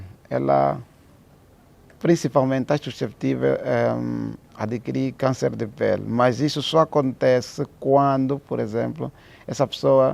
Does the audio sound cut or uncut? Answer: uncut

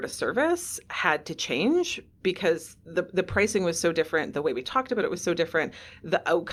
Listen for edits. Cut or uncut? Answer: uncut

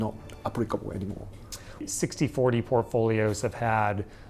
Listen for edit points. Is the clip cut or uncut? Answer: cut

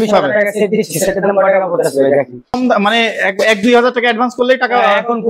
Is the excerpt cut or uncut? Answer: cut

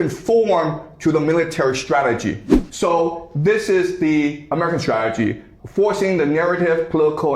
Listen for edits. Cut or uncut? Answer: cut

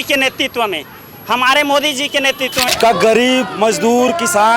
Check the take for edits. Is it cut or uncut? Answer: cut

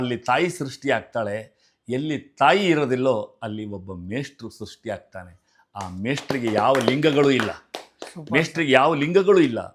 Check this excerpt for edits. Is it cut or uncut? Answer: uncut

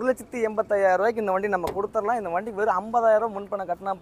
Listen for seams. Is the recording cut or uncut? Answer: uncut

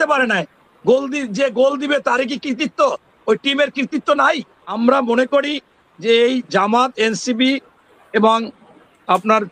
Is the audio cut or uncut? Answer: cut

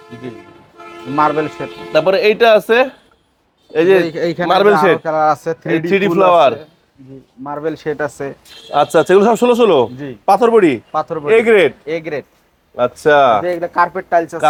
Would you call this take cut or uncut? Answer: uncut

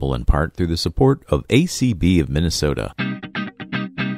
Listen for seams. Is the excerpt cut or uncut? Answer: cut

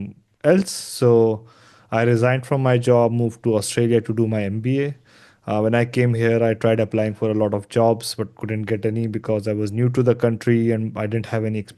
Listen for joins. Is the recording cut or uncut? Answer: uncut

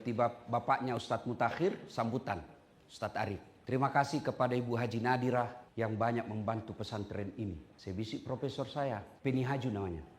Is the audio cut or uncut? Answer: cut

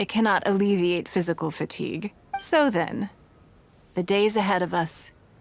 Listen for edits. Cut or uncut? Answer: cut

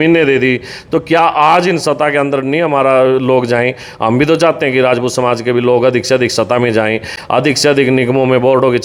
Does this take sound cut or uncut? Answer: uncut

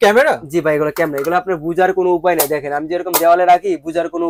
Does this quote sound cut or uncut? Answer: uncut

